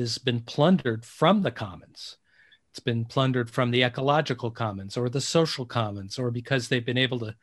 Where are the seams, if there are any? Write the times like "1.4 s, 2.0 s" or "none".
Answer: none